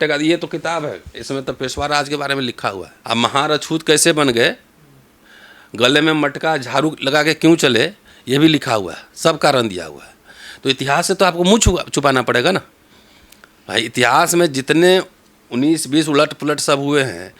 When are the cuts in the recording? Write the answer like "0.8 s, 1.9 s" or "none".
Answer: 2.9 s